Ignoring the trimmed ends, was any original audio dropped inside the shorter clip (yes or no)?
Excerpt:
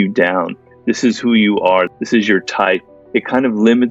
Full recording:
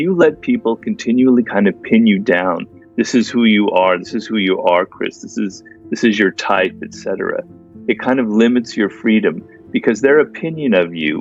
yes